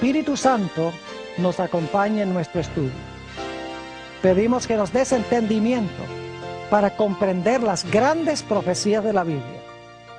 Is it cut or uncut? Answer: cut